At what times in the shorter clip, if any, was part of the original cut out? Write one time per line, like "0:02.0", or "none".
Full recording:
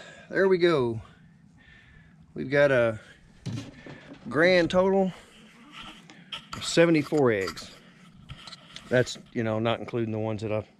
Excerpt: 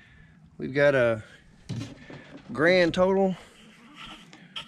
none